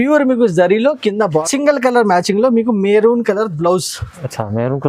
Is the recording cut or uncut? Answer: cut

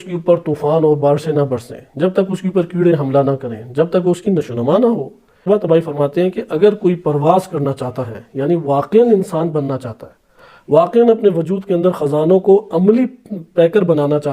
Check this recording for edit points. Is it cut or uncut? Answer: cut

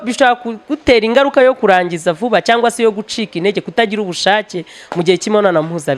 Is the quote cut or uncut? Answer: uncut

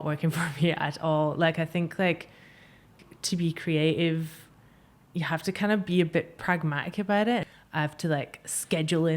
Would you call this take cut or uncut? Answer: cut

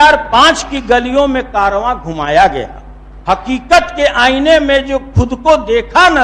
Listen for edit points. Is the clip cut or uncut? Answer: uncut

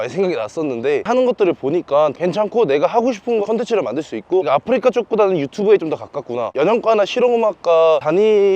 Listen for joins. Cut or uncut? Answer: cut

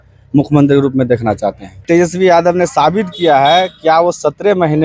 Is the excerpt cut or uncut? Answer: cut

